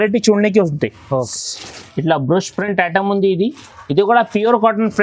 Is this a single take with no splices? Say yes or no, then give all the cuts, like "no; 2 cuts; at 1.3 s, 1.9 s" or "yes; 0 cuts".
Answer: no; 1 cut; at 1.3 s